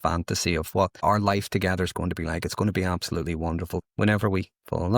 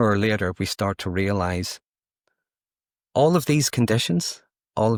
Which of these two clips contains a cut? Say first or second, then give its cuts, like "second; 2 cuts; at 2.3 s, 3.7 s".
first; 2 cuts; at 1.0 s, 3.8 s